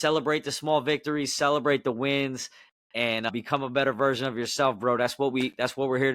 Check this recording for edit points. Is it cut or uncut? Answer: cut